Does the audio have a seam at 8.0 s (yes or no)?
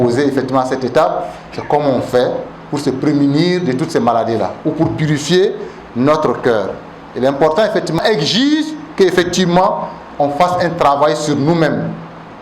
yes